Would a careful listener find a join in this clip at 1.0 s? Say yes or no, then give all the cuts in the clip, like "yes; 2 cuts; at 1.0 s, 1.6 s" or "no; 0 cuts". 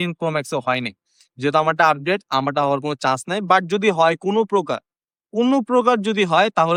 no; 0 cuts